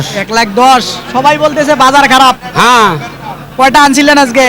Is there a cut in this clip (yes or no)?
no